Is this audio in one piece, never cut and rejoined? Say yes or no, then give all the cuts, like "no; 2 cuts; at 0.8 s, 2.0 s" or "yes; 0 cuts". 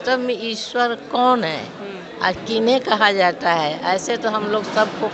yes; 0 cuts